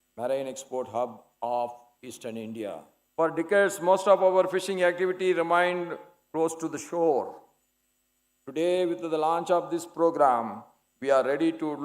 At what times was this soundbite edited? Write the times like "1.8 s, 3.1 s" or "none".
3.0 s